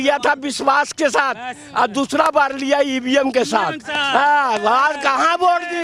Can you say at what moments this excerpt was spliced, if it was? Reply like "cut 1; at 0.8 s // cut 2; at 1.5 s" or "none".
none